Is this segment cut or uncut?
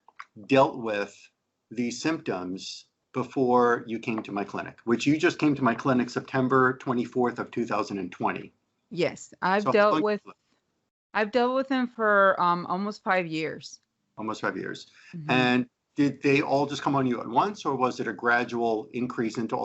uncut